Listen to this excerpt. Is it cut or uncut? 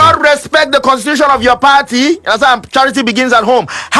uncut